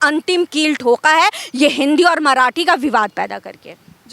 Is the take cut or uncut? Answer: uncut